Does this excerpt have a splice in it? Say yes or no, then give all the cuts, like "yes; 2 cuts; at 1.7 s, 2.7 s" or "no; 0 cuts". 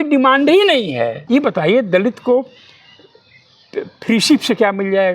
yes; 1 cut; at 1.2 s